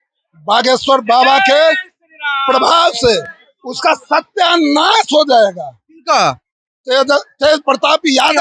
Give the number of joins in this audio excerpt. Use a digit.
0